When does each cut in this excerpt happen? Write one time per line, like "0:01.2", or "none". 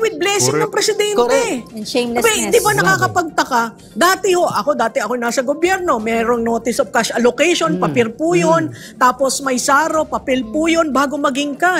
none